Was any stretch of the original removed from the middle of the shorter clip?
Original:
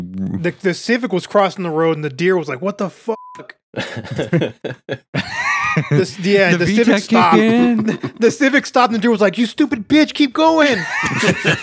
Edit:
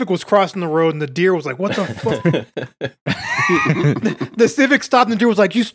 yes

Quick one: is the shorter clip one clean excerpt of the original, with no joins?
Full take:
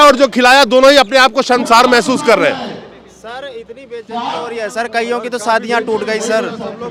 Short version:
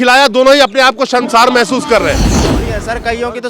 no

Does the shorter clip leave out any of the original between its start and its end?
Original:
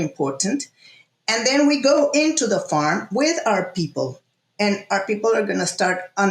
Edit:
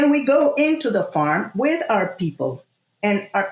no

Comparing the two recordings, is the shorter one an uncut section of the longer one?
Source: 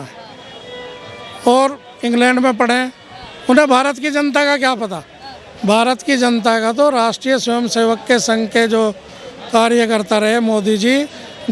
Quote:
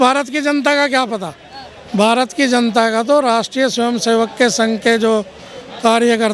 yes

